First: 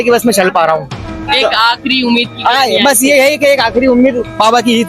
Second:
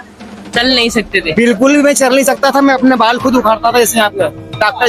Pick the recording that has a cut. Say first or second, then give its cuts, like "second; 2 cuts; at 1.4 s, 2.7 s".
first; 1 cut; at 1.2 s